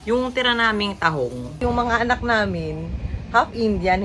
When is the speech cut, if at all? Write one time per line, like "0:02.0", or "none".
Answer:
0:01.6

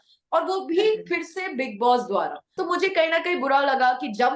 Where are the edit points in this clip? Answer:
0:02.4

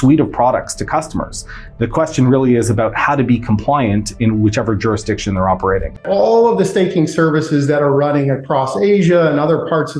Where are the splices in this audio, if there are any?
0:05.9

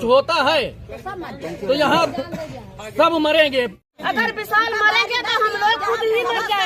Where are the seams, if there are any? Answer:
0:03.9

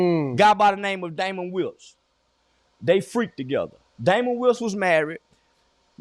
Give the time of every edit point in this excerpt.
none

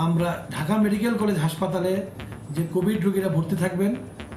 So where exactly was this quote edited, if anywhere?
none

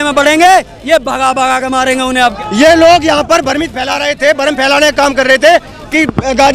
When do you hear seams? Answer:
0:02.2

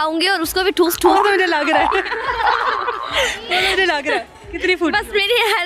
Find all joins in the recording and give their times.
none

